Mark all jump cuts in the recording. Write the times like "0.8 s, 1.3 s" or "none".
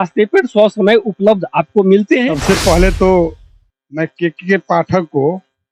2.3 s

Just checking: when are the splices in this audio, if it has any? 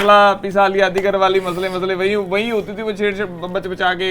none

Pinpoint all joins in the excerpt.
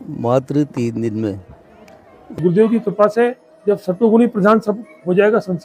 2.4 s

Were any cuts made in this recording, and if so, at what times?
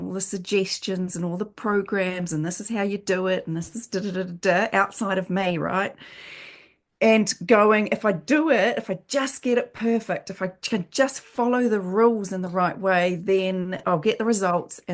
13.8 s

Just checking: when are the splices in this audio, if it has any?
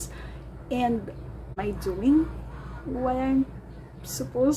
1.6 s

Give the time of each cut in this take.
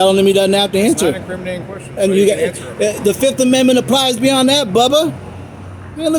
none

